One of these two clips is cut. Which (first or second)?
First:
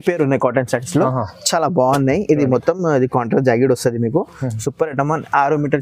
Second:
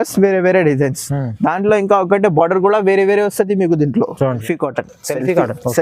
second